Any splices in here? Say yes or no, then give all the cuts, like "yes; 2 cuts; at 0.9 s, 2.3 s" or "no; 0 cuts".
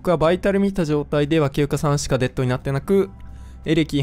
no; 0 cuts